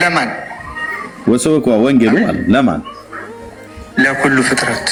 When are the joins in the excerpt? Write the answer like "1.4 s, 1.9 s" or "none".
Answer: none